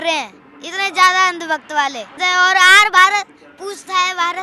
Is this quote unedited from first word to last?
no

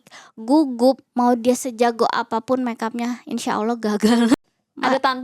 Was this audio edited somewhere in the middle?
yes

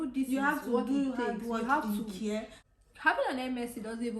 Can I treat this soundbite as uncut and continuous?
no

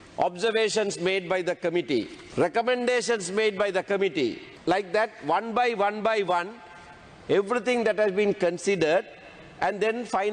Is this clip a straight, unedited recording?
no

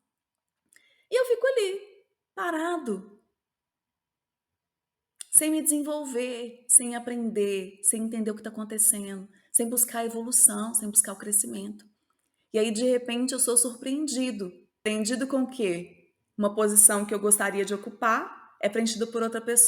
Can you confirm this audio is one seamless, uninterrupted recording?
no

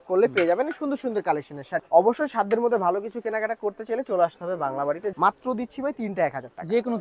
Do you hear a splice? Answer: yes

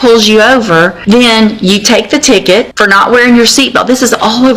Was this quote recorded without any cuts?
no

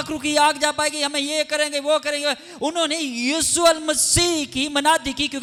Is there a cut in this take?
no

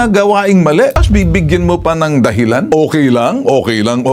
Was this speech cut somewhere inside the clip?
yes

